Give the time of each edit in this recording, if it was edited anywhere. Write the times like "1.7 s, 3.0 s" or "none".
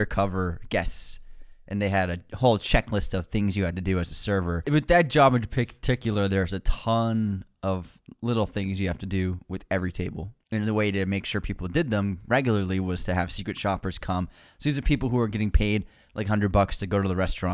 4.6 s, 10.3 s